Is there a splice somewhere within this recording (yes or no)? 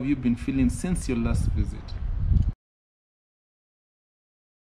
no